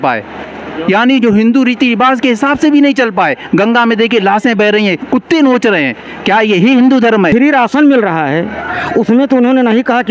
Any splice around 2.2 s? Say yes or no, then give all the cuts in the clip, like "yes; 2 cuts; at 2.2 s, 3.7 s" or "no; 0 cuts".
no; 1 cut; at 7.3 s